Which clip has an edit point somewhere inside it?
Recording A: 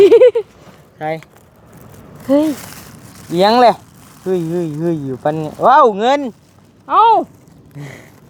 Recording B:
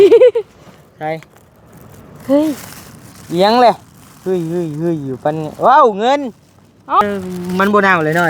B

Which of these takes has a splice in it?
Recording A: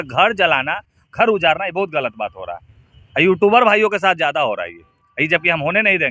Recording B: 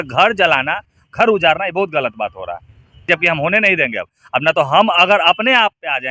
B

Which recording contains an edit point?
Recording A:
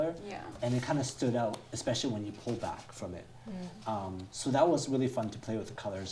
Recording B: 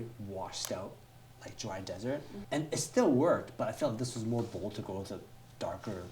B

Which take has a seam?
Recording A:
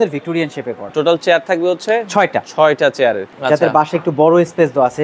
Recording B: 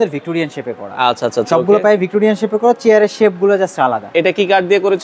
A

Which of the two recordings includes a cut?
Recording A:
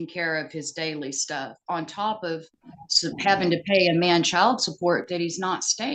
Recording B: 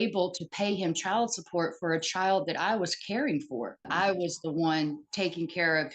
B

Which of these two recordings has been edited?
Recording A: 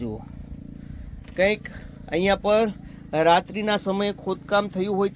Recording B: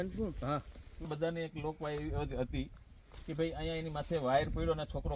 B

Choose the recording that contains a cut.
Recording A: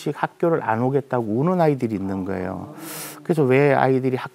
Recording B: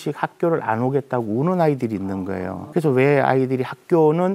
B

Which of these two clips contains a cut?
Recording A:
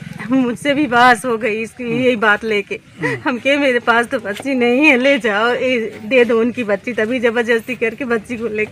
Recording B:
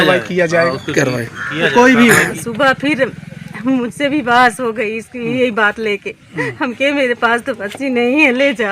B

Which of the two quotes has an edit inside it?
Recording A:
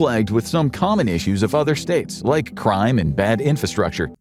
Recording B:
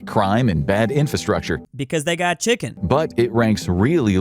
B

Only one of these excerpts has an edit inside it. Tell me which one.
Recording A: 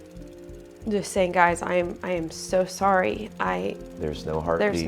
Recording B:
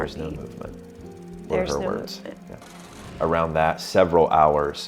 B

